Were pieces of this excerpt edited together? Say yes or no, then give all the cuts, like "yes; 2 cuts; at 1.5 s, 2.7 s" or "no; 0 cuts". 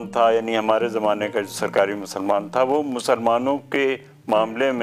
no; 0 cuts